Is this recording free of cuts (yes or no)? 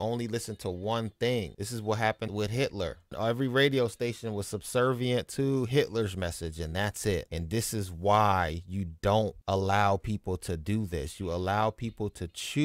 yes